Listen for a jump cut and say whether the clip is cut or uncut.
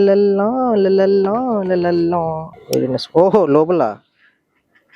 cut